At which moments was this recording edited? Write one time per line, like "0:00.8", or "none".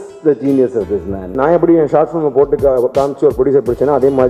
0:01.3